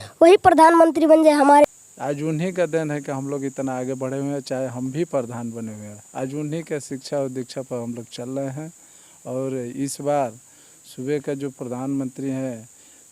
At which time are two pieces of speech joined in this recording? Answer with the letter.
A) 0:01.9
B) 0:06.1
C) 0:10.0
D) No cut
A